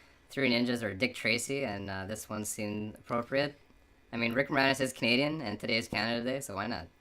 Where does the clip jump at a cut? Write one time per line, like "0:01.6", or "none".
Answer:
0:03.4